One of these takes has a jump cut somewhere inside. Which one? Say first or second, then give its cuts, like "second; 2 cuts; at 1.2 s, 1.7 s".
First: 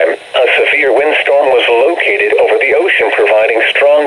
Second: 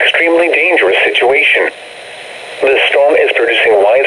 first; 1 cut; at 3.1 s